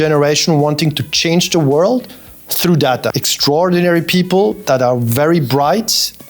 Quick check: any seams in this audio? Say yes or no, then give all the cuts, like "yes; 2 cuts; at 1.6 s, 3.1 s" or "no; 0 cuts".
yes; 1 cut; at 3.3 s